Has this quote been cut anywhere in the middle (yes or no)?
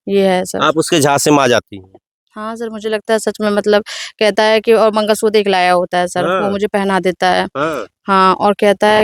no